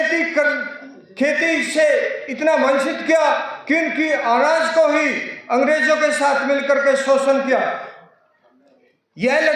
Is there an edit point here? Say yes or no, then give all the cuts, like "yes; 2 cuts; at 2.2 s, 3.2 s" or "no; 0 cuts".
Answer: no; 0 cuts